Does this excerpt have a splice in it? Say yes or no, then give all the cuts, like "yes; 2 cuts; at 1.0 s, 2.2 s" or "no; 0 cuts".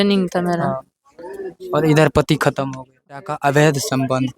yes; 1 cut; at 3.3 s